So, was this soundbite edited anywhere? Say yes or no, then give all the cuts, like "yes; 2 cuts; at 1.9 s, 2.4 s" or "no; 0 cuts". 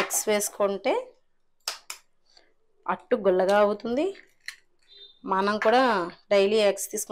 no; 0 cuts